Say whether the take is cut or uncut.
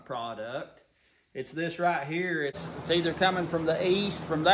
cut